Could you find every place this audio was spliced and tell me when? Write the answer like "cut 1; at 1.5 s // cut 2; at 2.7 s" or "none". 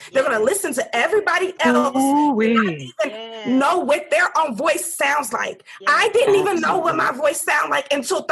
none

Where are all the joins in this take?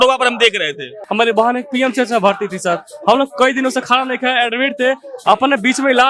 cut 1; at 1.0 s

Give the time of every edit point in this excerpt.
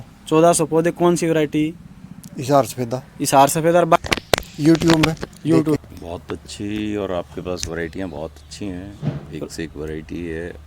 cut 1; at 4.0 s // cut 2; at 5.8 s

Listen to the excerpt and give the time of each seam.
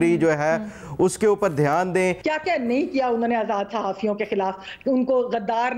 cut 1; at 2.2 s

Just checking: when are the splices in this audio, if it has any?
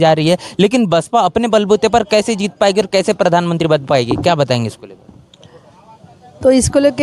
none

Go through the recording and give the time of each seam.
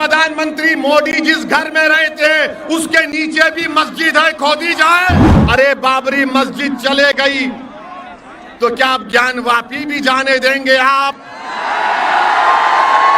cut 1; at 5.3 s

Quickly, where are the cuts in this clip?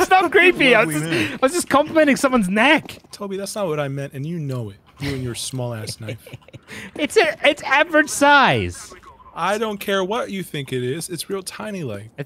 cut 1; at 2.9 s

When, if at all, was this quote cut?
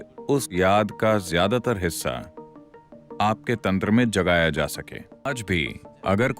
cut 1; at 5.3 s

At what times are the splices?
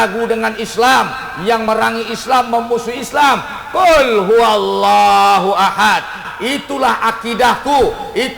cut 1; at 1.6 s // cut 2; at 6.2 s

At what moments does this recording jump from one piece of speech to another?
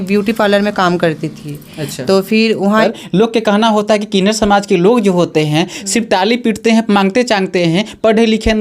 cut 1; at 2.8 s

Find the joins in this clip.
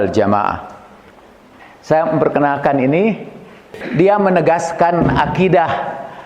cut 1; at 3.6 s

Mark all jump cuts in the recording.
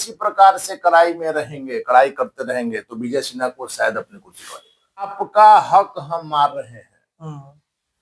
cut 1; at 5.2 s

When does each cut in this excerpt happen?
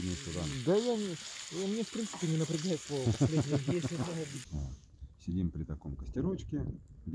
cut 1; at 4.4 s

